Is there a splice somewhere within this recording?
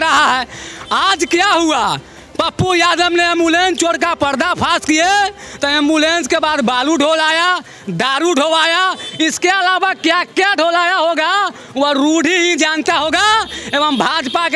no; 0 cuts

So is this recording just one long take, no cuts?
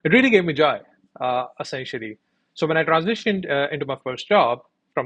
yes; 0 cuts

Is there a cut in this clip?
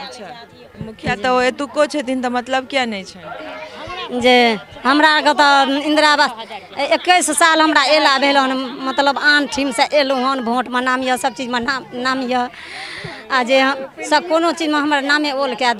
no; 0 cuts

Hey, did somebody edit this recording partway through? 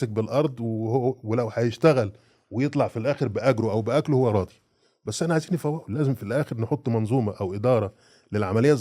no; 0 cuts

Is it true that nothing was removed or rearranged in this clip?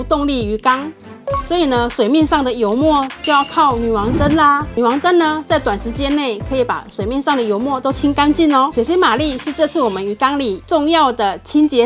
no; 3 cuts; at 4.7 s, 8.7 s, 10.6 s

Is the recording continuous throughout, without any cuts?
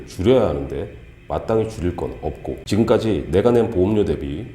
no; 1 cut; at 2.5 s

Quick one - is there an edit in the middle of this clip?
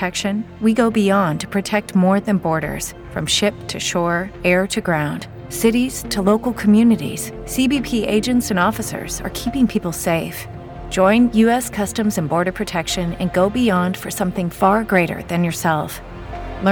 no; 0 cuts

